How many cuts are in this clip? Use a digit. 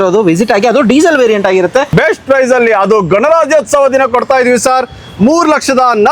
1